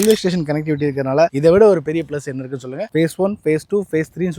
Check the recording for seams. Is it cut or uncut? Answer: cut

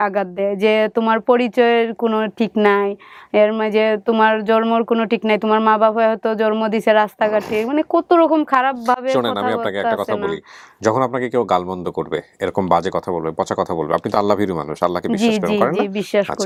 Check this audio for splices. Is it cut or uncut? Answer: uncut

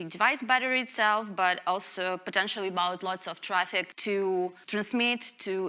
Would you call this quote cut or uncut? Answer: cut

